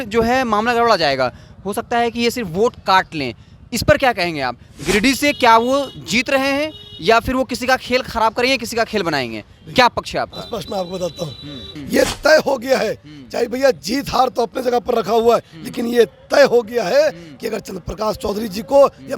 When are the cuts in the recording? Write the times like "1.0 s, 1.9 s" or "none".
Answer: 11.6 s